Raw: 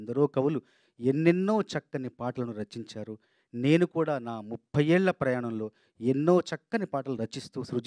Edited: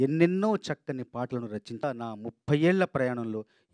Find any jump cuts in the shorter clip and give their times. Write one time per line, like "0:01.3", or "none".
0:01.8